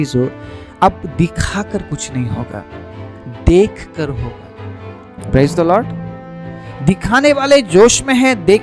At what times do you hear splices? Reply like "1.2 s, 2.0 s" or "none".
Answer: none